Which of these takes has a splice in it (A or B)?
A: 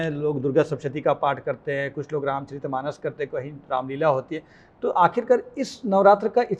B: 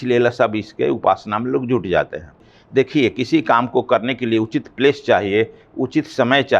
B